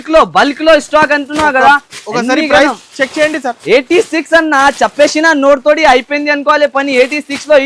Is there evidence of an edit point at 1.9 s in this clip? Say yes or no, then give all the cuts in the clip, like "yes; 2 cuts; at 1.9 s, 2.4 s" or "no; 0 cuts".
no; 0 cuts